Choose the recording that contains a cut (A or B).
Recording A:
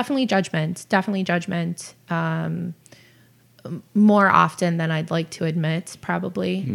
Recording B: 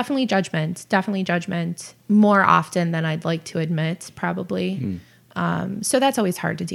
B